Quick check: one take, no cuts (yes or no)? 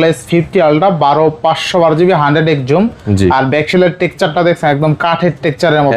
yes